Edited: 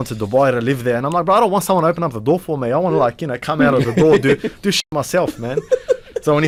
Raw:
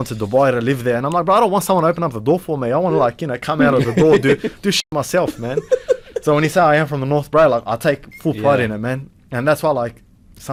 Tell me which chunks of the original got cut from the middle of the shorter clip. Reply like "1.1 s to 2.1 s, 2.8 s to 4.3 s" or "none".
none